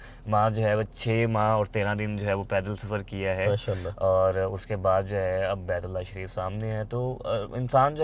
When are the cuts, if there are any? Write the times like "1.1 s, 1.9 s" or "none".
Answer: none